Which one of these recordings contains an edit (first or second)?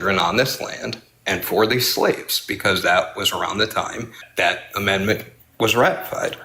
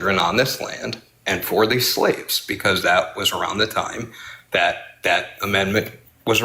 first